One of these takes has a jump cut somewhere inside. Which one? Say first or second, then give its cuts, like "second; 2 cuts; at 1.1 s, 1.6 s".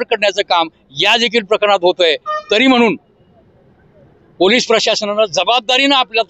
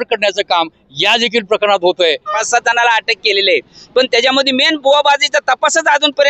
second; 1 cut; at 2.3 s